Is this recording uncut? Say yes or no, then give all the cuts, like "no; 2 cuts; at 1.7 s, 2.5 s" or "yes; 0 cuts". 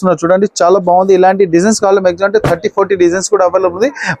yes; 0 cuts